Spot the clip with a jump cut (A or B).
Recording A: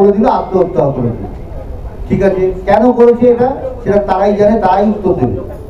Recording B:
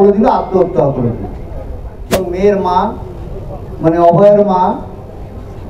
B